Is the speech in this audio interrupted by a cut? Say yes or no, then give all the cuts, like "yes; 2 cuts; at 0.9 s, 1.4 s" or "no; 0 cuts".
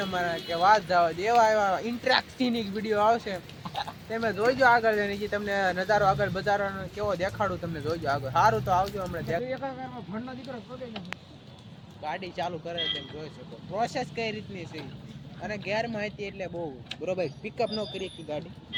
no; 0 cuts